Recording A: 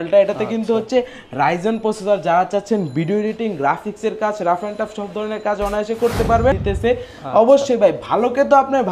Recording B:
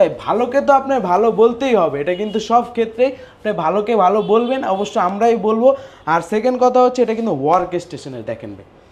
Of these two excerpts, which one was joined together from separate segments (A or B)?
A